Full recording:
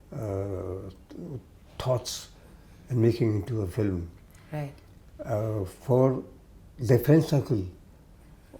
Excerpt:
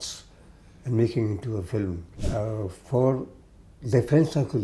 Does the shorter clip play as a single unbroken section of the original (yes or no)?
no